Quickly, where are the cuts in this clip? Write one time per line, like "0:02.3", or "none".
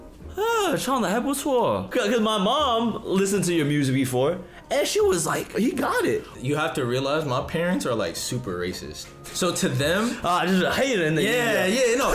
0:01.9
0:05.5
0:06.3